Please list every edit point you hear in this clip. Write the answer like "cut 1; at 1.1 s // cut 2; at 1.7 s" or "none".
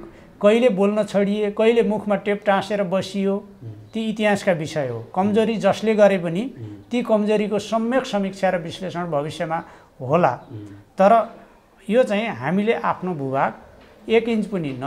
none